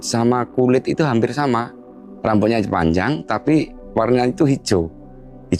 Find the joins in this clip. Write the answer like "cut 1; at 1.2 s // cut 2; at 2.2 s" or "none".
none